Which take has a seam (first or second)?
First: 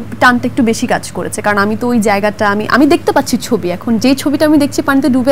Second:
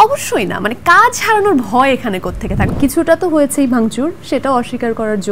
second